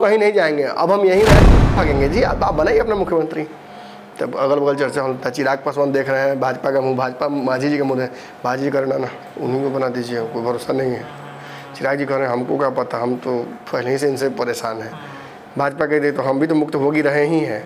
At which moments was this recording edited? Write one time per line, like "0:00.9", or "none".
0:01.5

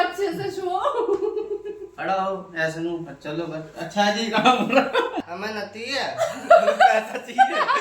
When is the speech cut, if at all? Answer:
0:05.2

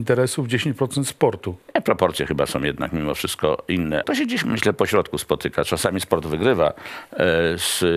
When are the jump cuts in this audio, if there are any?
0:01.6
0:04.0

